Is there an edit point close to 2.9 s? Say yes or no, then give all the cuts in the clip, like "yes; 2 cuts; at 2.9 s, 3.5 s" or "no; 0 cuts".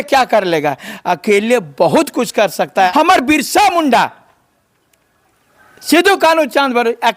yes; 1 cut; at 2.9 s